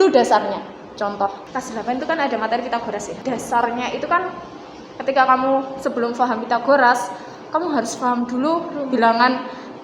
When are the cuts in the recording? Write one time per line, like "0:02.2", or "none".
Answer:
0:01.4
0:03.1